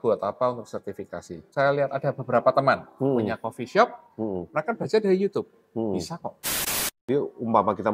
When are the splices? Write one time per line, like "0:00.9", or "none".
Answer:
0:01.4
0:06.7